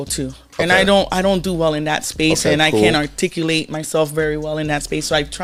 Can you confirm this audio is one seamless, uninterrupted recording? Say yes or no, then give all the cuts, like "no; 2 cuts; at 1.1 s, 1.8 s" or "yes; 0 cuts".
yes; 0 cuts